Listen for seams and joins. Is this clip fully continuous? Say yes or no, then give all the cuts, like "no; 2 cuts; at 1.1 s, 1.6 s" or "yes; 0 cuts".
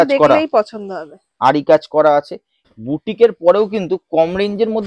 no; 1 cut; at 2.6 s